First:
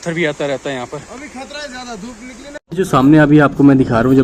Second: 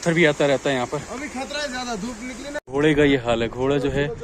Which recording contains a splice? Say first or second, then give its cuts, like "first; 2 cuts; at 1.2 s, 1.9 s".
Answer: second; 1 cut; at 2.6 s